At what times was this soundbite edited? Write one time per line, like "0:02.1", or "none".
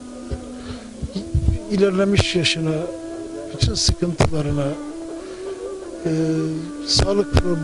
0:01.5